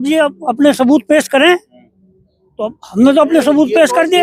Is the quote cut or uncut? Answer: uncut